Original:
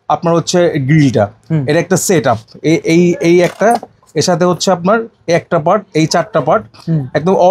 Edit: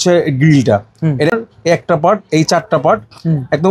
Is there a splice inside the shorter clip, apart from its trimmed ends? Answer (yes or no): yes